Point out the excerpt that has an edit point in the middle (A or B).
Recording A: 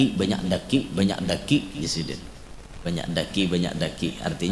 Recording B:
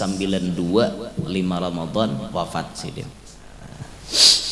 B